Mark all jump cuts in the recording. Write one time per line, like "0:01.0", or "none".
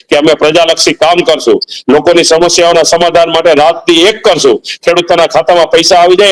none